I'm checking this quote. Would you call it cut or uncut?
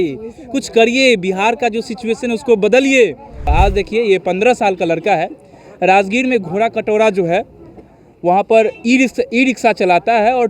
cut